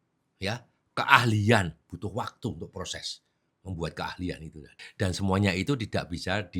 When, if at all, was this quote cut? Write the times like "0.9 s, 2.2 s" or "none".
4.8 s